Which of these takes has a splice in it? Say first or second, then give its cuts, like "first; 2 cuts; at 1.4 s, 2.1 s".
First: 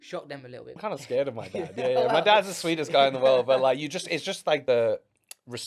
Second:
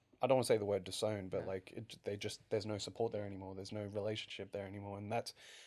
first; 2 cuts; at 0.8 s, 4.6 s